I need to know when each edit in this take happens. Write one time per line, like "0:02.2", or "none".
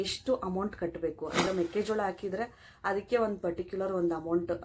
0:01.5